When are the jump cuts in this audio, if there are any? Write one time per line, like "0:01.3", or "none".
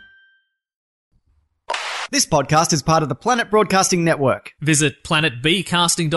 0:00.9